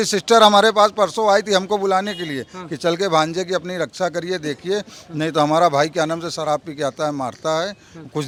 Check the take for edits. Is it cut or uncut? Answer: uncut